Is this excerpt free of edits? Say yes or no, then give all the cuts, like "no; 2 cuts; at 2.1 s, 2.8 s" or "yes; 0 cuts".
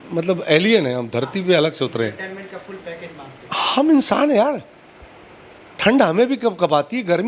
yes; 0 cuts